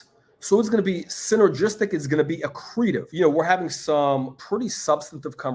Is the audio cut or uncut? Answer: cut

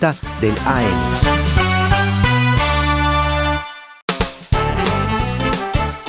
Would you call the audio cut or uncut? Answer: cut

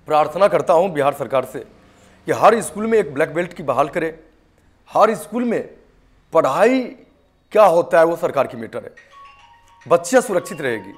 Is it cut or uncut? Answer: uncut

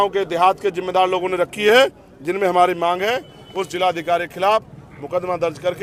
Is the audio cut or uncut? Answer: uncut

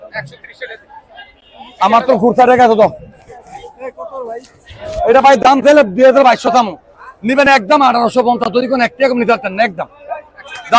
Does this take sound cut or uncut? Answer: uncut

